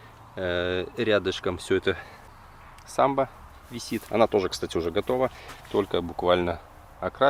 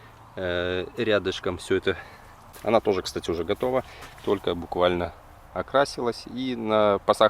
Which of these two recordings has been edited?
second; 1 cut; at 2.5 s

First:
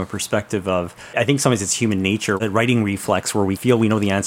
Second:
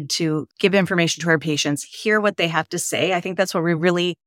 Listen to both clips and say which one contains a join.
first; 1 cut; at 2.4 s

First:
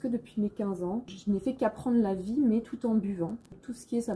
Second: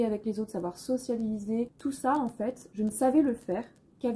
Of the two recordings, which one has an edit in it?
second; 2 cuts; at 1.7 s, 2.6 s

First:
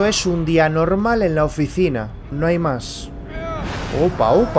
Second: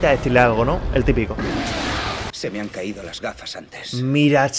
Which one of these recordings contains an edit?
second; 1 cut; at 2.3 s

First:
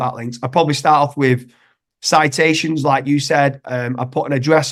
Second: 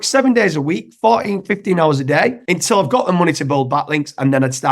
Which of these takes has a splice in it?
second; 1 cut; at 2.4 s

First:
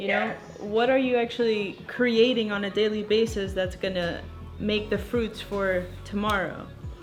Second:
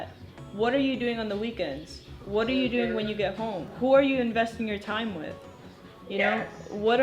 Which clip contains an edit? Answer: second; 1 cut; at 3.7 s

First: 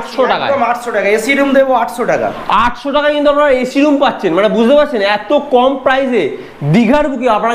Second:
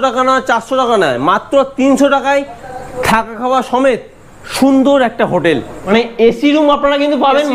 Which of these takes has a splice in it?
second; 1 cut; at 5.7 s

